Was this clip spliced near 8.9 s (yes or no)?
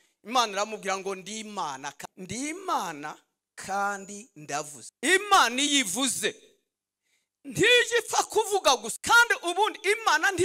yes